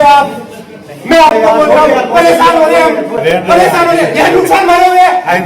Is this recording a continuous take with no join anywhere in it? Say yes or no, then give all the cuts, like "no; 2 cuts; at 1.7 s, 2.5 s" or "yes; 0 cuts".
no; 1 cut; at 3.2 s